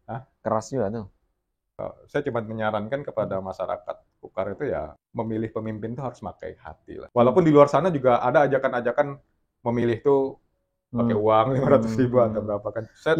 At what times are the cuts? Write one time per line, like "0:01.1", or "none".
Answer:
0:01.7
0:05.0
0:07.1